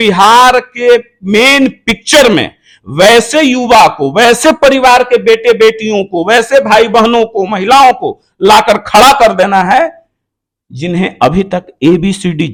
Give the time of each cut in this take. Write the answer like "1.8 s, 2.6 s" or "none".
none